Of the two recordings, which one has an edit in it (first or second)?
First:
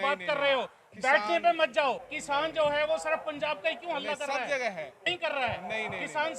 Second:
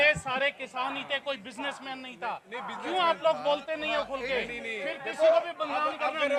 first